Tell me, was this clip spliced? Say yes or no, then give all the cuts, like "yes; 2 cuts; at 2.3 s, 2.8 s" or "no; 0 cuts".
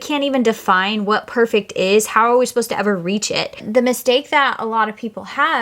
yes; 1 cut; at 3.7 s